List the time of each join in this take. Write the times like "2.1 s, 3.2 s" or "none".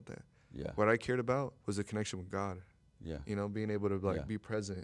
1.6 s